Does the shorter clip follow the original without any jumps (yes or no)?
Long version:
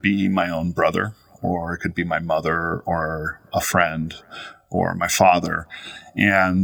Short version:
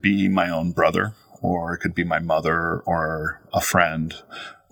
yes